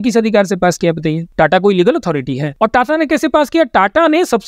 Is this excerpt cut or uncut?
cut